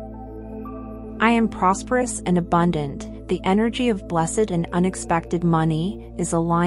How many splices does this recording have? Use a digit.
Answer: 1